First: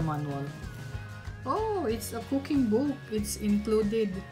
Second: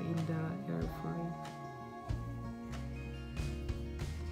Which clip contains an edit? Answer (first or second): second